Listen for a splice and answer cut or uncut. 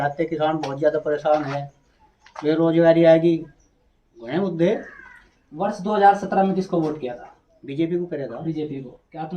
uncut